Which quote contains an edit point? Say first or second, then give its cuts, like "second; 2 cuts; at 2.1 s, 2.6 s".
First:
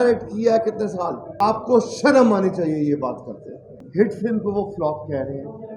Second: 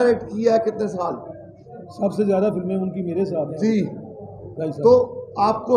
first; 2 cuts; at 1.2 s, 3.6 s